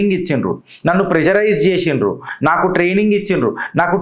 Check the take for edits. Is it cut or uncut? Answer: uncut